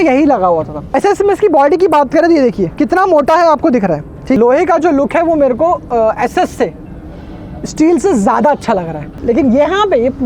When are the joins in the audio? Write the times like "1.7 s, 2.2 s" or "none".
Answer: 0.9 s, 4.4 s, 9.2 s